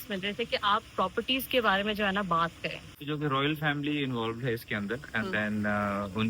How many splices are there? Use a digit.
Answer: 1